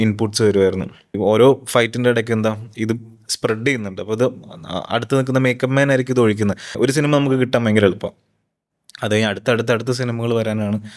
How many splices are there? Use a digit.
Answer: 2